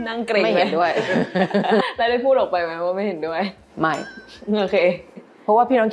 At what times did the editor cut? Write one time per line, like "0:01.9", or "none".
none